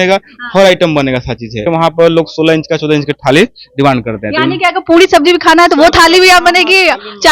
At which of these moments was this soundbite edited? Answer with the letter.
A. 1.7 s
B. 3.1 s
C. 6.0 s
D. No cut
A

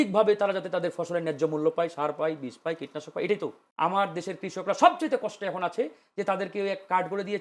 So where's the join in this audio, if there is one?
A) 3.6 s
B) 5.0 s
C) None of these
A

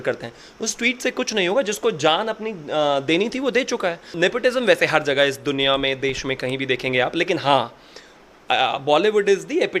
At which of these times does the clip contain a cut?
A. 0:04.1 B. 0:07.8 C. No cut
A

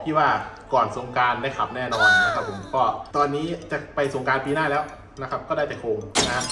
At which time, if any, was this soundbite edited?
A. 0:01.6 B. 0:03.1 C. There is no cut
C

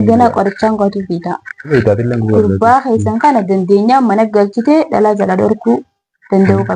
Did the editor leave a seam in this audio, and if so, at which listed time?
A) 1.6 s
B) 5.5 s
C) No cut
A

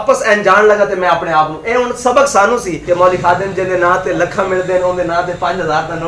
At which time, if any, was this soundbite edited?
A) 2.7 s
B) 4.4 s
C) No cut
A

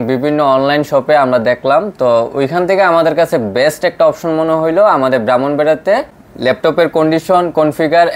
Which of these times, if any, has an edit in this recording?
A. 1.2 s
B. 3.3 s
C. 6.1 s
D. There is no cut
C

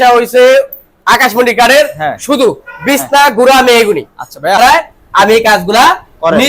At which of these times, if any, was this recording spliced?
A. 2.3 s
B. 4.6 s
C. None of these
B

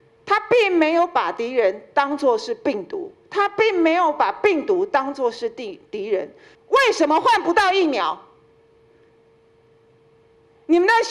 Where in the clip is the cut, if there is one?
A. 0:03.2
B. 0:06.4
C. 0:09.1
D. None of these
B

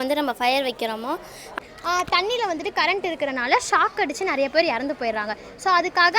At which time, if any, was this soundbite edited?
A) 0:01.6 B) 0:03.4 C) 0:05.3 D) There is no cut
A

